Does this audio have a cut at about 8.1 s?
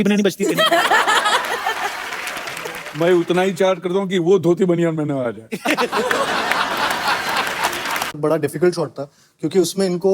yes; 1 cut; at 8.1 s

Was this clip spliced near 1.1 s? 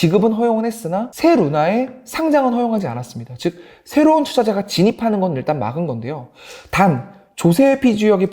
yes; 1 cut; at 1.1 s

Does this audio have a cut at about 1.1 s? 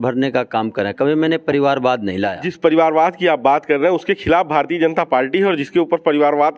no; 1 cut; at 2.4 s

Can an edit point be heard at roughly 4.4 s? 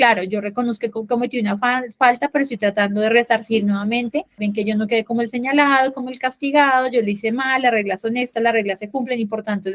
yes; 1 cut; at 4.4 s

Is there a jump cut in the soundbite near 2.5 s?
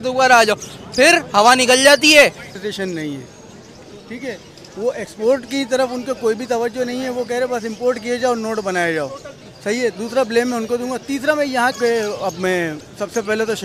yes; 2 cuts; at 2.5 s, 11.8 s

